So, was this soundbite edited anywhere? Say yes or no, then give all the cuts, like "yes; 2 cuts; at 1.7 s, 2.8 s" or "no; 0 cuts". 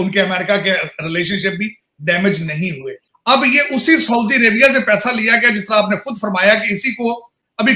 yes; 1 cut; at 3.0 s